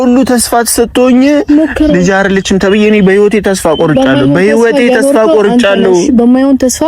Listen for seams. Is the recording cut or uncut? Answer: uncut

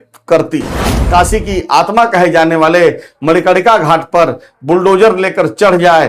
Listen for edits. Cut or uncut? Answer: cut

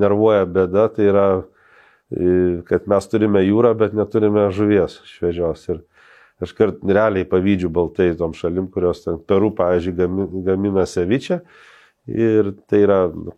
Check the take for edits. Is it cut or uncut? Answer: uncut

